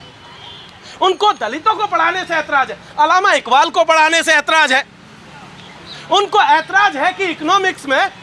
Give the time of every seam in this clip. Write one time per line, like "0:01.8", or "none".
none